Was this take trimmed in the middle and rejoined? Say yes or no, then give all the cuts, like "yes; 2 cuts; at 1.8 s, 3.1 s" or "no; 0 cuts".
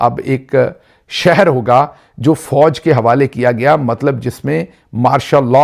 no; 0 cuts